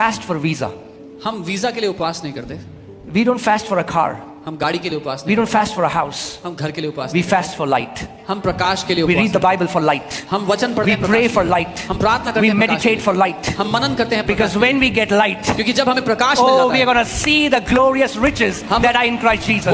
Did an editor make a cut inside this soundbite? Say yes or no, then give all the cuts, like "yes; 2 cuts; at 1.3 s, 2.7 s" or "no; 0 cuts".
no; 0 cuts